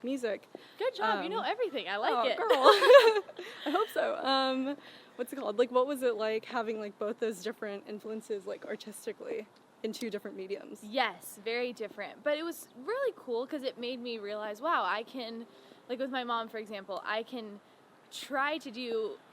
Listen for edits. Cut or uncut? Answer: uncut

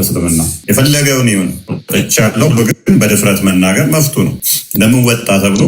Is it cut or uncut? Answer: uncut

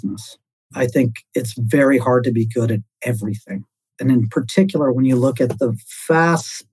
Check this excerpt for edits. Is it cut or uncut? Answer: cut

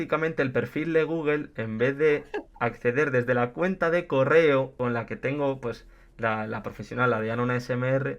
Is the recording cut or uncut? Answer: cut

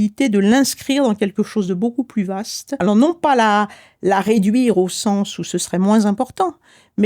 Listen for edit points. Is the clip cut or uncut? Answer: cut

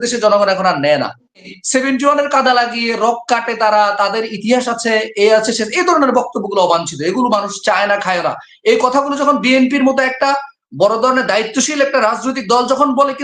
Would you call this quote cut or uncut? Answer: cut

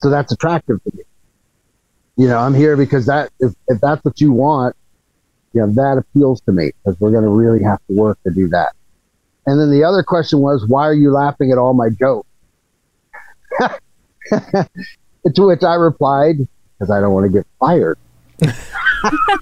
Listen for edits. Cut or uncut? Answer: uncut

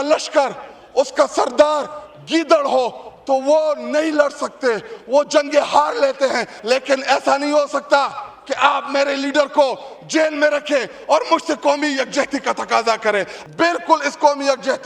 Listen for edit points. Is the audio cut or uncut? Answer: cut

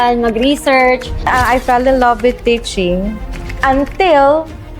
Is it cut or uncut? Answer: cut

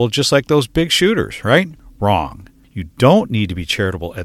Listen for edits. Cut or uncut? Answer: cut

